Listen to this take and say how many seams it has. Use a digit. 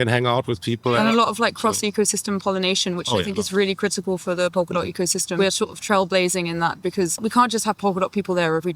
3